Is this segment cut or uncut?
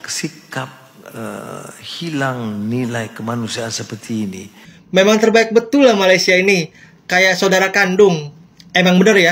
cut